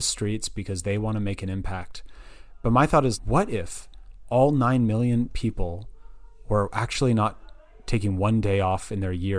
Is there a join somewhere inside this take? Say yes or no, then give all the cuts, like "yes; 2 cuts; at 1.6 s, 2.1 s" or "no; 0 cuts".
no; 0 cuts